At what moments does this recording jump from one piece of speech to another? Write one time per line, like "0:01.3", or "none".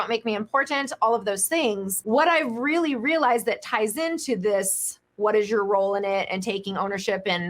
0:01.9